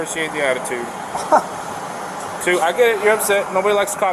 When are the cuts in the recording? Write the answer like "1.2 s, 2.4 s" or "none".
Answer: none